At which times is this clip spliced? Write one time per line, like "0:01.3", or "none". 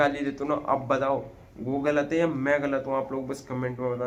none